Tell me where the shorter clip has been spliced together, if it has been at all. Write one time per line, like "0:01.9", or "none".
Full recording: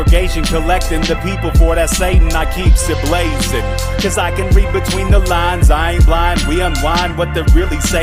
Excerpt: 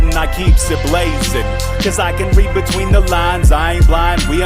none